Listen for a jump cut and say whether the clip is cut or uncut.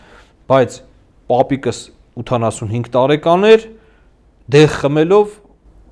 uncut